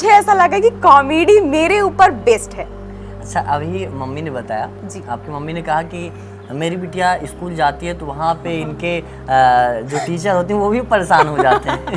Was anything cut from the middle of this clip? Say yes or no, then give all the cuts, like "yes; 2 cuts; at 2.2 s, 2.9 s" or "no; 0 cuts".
no; 0 cuts